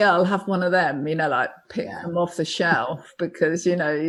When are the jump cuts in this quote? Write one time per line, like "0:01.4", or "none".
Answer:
none

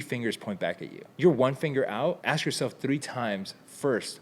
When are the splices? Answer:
0:01.1
0:02.2

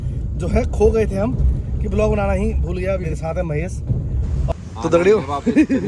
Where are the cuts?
0:03.1
0:04.5

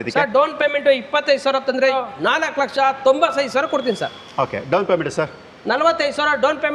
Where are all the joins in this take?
0:01.9

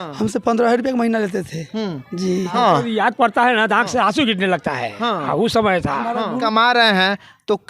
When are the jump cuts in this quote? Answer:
0:02.5
0:06.4

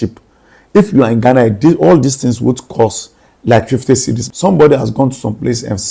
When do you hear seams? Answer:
0:04.2

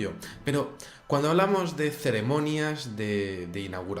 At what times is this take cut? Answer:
0:02.1

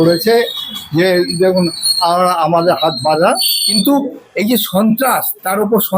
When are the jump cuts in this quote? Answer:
0:03.6

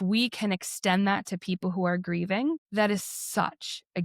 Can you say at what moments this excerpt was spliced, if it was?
0:02.6

